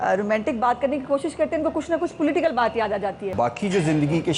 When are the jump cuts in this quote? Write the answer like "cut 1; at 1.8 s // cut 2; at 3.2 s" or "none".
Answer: cut 1; at 3.2 s